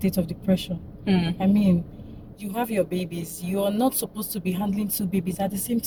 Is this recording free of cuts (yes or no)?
yes